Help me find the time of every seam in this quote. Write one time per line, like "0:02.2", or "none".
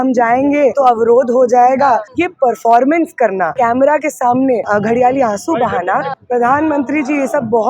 0:00.7
0:02.1
0:03.5
0:04.7
0:06.2